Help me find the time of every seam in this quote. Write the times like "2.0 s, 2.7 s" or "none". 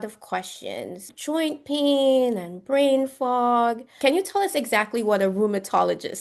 1.1 s, 3.9 s